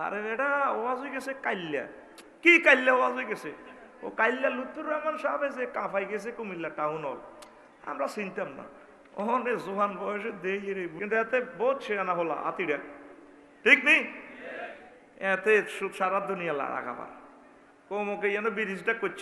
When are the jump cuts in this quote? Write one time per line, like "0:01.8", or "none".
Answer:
0:10.9